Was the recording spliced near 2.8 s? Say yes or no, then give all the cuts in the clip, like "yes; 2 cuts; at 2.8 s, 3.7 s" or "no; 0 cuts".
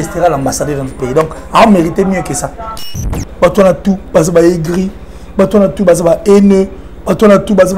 yes; 1 cut; at 2.8 s